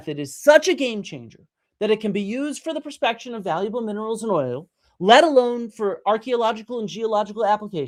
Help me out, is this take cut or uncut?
uncut